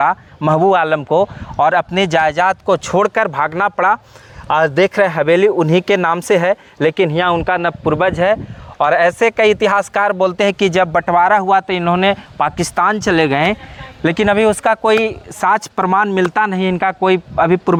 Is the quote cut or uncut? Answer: uncut